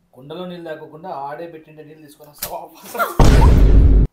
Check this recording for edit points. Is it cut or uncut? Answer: cut